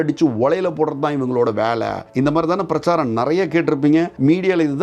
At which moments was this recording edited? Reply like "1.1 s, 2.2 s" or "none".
2.0 s